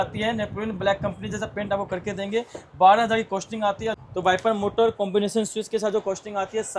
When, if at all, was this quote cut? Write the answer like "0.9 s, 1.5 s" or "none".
4.0 s